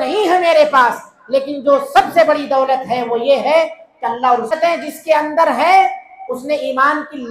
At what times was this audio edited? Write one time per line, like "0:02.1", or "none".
0:04.5